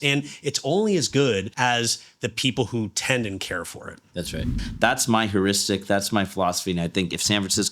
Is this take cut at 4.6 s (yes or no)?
yes